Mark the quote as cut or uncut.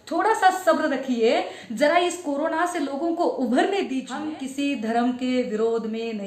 cut